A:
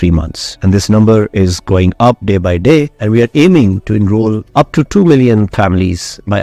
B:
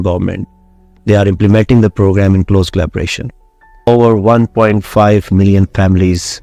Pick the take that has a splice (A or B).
B